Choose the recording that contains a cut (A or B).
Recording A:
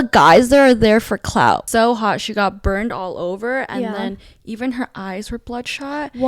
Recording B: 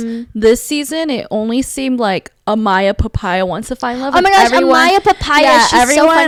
A